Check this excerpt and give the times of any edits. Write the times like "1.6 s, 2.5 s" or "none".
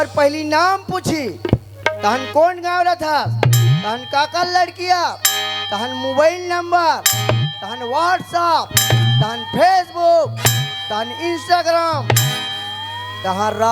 none